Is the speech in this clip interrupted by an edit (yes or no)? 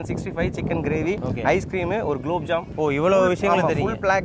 no